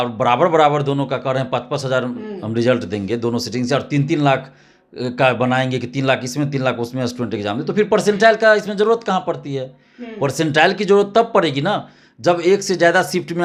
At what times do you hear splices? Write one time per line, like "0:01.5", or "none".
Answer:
none